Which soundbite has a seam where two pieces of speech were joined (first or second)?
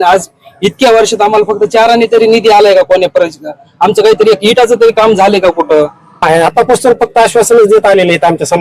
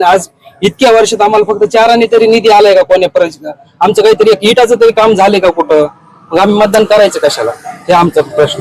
first